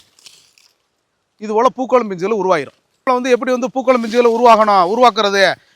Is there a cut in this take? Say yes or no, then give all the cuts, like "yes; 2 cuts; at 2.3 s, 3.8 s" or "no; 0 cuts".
yes; 1 cut; at 3.1 s